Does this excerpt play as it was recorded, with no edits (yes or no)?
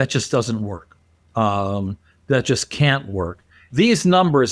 no